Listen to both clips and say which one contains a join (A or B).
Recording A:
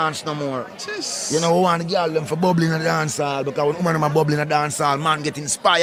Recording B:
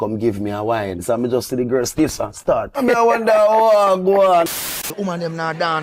B